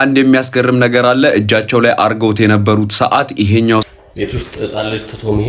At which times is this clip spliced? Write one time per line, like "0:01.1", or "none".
0:03.9